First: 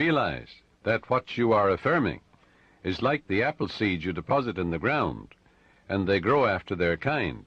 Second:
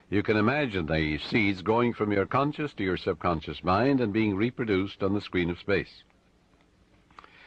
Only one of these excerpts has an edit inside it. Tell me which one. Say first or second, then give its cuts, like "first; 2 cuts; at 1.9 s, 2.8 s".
second; 1 cut; at 3.0 s